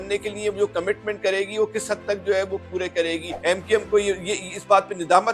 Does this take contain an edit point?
yes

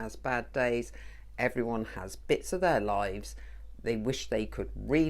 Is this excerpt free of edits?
yes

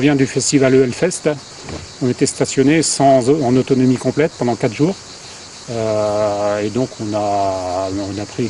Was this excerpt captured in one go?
yes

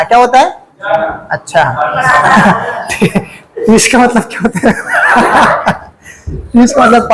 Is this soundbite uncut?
yes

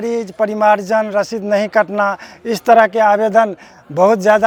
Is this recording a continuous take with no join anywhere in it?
yes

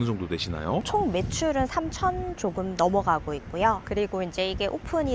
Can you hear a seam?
no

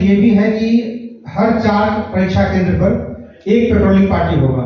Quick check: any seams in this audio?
no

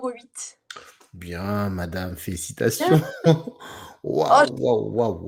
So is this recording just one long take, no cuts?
yes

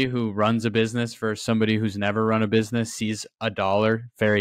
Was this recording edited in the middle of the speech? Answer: no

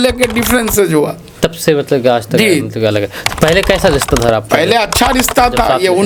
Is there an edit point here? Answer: no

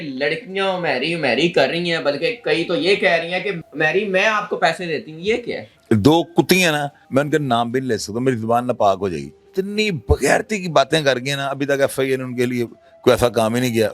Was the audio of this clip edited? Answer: yes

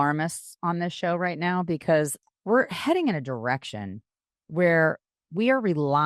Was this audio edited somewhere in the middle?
yes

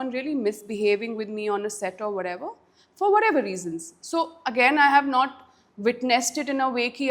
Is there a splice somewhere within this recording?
no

